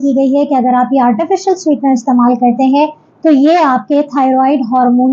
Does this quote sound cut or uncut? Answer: uncut